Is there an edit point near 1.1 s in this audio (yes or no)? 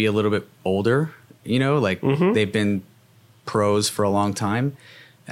no